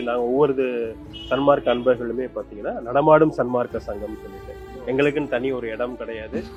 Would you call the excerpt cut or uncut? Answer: uncut